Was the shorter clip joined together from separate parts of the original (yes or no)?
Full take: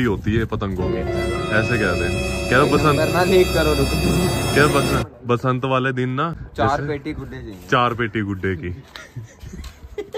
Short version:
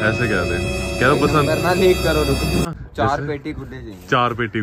yes